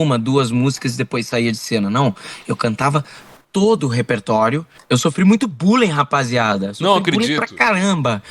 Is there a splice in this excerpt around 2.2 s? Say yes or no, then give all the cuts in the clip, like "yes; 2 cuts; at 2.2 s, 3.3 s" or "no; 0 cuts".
no; 1 cut; at 4.7 s